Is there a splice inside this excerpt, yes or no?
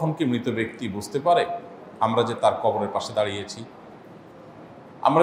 no